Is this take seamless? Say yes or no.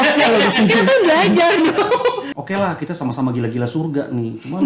no